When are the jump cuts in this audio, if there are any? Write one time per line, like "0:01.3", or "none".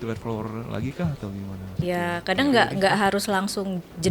0:01.8